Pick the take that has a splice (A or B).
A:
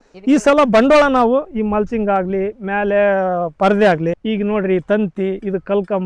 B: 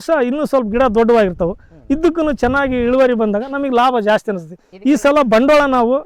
A